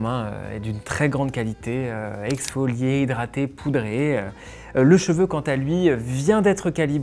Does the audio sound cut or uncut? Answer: uncut